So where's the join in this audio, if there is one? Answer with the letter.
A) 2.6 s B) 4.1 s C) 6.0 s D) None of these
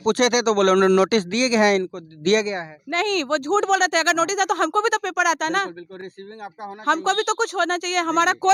D